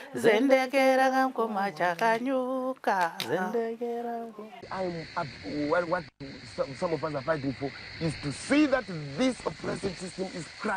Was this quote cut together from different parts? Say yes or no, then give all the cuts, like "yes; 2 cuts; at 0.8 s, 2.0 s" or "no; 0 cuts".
yes; 1 cut; at 4.6 s